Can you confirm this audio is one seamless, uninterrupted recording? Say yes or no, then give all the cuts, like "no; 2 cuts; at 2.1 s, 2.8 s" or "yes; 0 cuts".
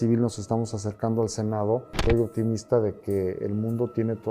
no; 1 cut; at 1.9 s